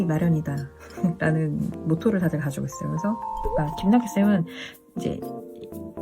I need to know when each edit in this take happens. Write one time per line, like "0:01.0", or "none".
0:01.7
0:03.4